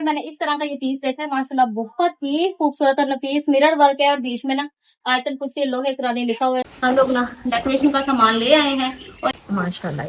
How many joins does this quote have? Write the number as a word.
two